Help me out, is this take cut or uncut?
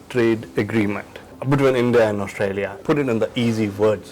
cut